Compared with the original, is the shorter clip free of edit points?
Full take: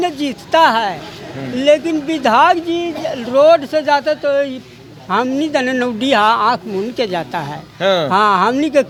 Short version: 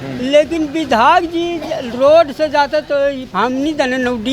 no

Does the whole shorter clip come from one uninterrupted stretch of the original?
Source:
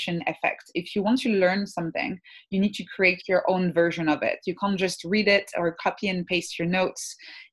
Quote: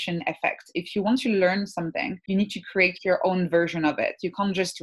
no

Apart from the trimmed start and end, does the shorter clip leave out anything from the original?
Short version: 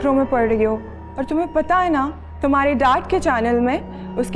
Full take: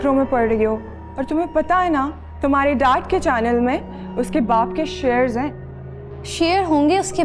no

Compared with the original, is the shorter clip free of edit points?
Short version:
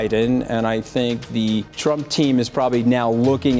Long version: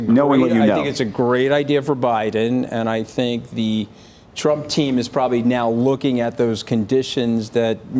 no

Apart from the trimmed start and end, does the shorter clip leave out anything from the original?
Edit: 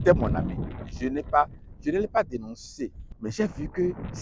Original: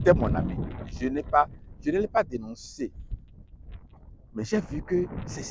yes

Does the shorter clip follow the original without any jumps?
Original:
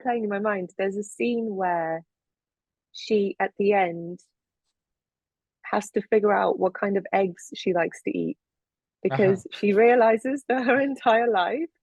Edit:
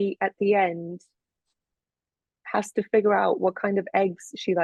yes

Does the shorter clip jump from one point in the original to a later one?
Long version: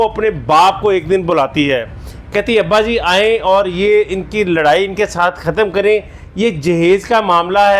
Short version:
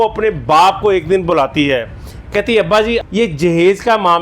yes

